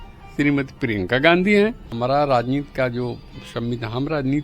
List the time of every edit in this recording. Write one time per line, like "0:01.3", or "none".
0:01.9